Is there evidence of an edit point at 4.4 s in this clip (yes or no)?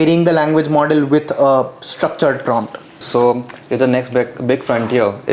no